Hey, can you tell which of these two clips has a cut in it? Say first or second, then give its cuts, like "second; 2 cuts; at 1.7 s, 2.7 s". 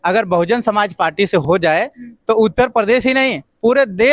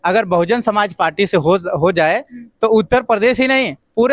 first; 1 cut; at 1.4 s